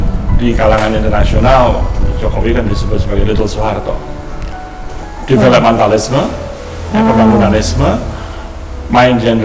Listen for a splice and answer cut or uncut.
uncut